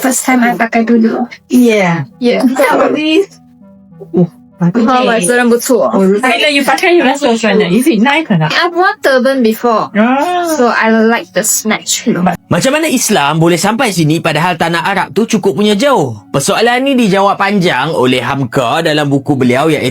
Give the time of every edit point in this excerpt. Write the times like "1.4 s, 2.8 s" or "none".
12.4 s